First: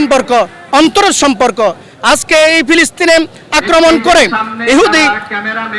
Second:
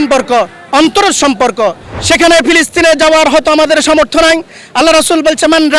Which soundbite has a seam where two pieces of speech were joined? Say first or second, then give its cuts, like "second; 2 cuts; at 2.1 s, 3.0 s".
second; 1 cut; at 1.9 s